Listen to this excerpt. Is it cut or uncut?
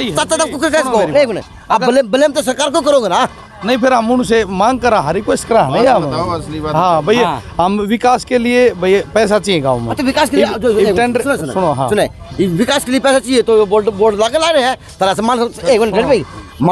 uncut